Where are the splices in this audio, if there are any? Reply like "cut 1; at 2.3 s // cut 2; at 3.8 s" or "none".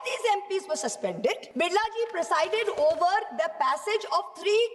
cut 1; at 1.4 s